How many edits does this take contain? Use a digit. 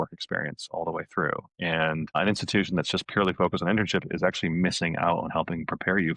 1